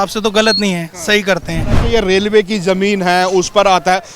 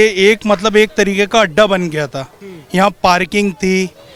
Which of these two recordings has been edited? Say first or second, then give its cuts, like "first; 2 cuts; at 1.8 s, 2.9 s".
first; 1 cut; at 1.8 s